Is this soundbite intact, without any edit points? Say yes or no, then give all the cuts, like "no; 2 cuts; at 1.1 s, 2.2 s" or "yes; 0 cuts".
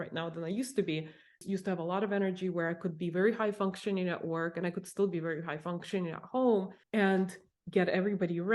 no; 2 cuts; at 1.4 s, 7.2 s